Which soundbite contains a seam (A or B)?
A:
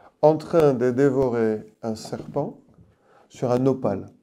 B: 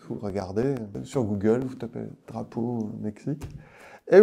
B